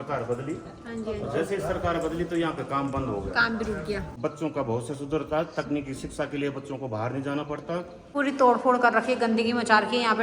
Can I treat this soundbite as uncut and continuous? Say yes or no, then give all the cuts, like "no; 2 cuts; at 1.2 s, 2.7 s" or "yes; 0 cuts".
no; 2 cuts; at 4.1 s, 8.0 s